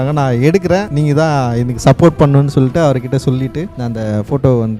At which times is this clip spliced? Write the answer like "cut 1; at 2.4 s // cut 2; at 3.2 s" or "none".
none